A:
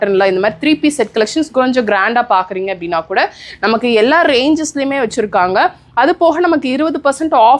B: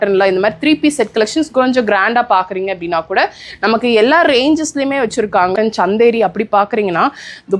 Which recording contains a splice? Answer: B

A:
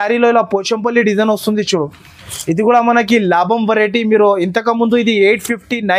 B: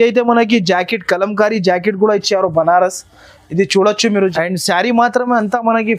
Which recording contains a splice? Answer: B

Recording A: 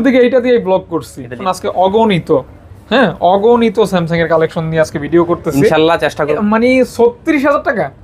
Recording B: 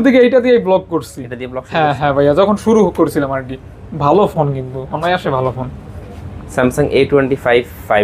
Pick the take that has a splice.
A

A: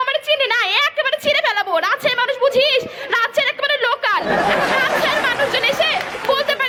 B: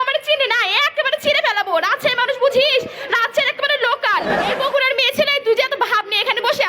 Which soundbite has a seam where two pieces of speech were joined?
B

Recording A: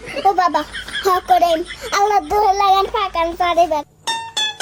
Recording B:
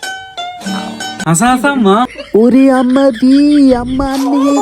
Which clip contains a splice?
B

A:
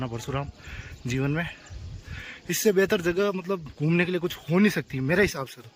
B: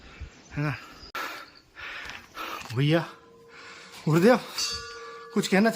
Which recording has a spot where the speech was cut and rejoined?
B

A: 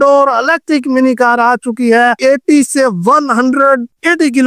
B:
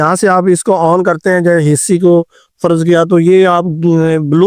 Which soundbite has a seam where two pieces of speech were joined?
A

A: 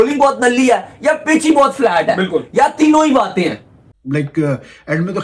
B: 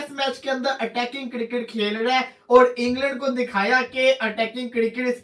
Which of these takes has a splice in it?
A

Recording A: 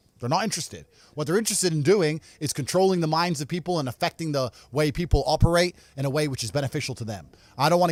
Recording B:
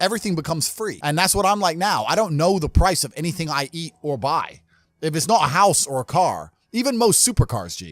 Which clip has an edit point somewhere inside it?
B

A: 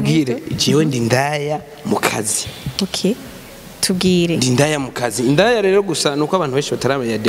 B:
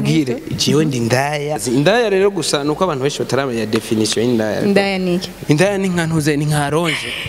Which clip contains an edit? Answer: B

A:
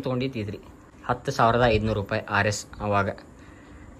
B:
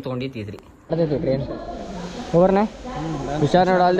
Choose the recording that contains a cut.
B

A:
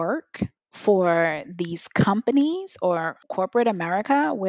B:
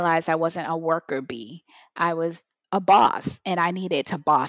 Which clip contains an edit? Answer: A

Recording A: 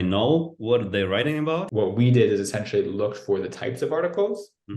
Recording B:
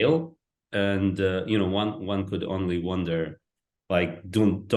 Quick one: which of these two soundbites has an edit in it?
A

